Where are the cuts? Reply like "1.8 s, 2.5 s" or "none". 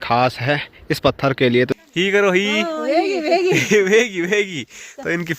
1.7 s